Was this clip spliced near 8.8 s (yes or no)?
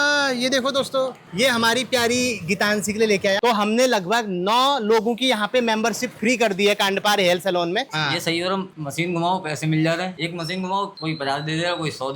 yes